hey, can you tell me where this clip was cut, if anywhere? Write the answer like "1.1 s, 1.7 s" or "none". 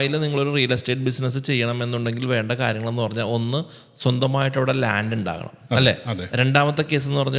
none